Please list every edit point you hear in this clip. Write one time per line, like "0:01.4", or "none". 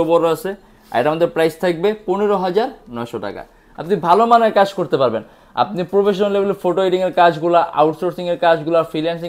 none